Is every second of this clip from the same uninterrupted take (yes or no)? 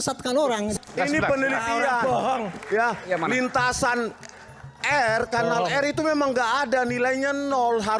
yes